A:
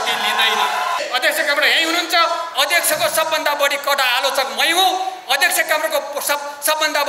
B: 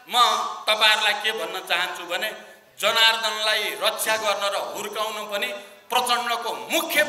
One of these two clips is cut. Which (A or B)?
A